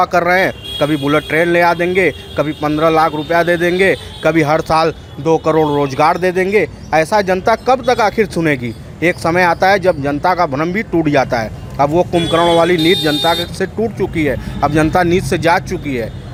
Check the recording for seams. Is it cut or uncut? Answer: uncut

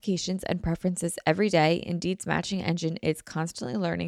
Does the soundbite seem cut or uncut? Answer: uncut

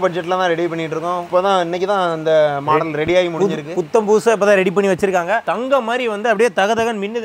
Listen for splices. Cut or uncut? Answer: uncut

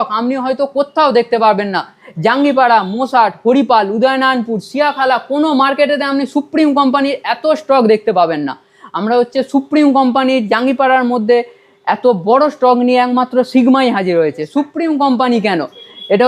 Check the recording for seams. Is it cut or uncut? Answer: uncut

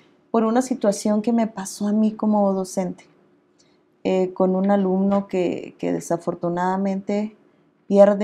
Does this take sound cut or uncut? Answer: uncut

